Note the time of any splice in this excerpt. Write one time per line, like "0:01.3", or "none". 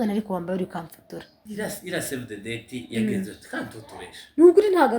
0:01.4